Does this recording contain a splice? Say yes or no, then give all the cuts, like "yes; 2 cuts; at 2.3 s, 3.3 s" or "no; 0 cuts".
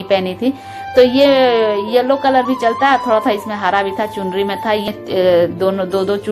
yes; 1 cut; at 4.9 s